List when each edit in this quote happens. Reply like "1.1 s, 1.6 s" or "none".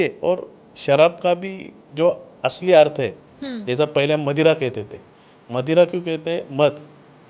none